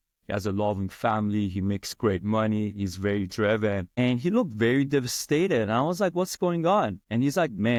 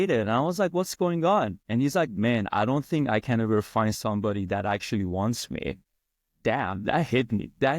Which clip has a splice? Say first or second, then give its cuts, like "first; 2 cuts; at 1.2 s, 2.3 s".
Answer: second; 1 cut; at 6.3 s